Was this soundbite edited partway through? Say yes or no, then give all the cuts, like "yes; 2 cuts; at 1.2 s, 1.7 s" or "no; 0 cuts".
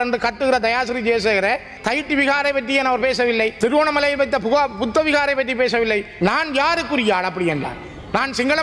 yes; 3 cuts; at 1.7 s, 3.5 s, 6.1 s